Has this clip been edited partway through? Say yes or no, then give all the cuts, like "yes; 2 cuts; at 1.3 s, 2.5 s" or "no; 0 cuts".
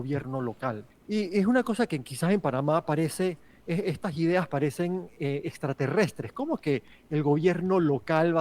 yes; 1 cut; at 0.9 s